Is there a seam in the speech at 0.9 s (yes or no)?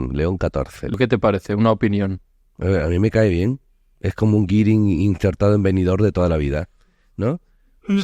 yes